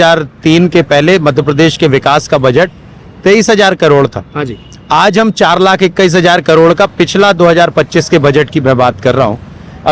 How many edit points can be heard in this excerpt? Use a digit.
0